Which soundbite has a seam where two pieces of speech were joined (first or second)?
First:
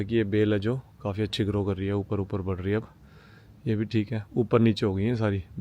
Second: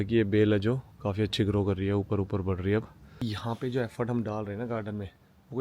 second